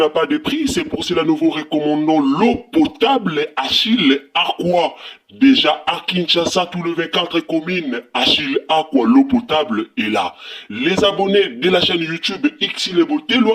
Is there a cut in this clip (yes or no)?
no